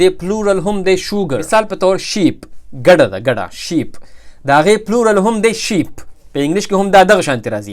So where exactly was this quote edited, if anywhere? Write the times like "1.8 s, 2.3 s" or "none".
1.4 s